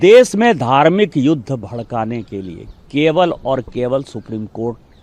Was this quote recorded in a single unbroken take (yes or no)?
yes